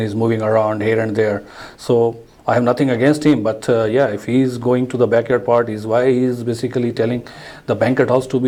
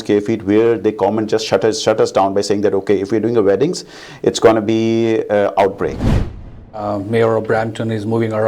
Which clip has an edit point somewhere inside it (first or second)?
second